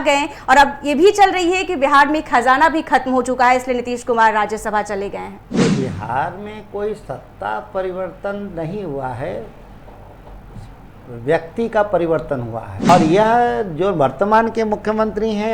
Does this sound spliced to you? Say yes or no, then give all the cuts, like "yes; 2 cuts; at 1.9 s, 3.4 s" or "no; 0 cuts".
yes; 2 cuts; at 5.4 s, 12.9 s